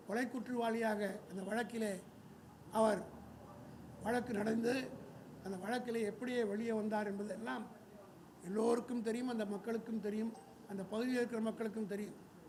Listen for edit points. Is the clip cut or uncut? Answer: uncut